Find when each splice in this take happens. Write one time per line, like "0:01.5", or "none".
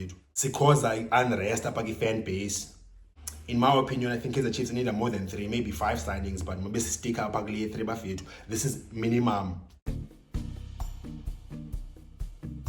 0:09.7